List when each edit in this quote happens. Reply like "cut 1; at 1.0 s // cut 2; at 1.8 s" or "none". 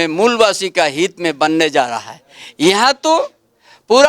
none